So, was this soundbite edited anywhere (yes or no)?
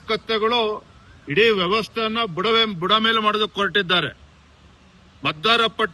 no